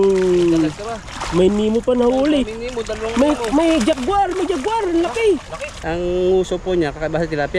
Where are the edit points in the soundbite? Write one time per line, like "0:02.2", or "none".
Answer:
0:05.8